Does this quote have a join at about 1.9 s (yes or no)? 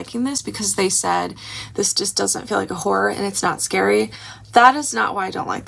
no